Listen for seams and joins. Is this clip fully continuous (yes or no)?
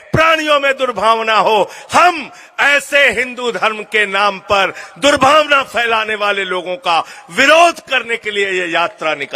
yes